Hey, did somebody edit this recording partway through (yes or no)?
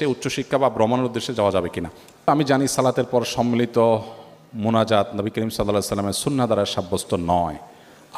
yes